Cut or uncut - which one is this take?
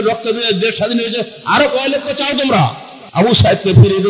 cut